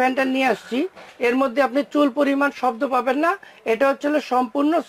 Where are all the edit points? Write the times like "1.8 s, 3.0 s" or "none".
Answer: none